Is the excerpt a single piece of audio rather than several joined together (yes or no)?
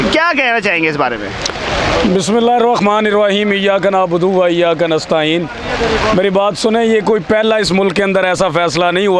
yes